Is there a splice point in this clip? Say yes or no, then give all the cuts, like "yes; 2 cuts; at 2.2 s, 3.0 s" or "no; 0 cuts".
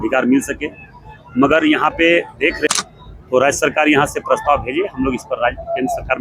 yes; 1 cut; at 2.7 s